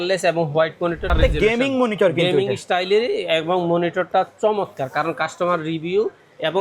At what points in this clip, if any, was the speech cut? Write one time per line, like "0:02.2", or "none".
0:01.0

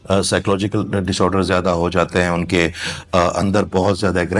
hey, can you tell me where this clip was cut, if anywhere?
none

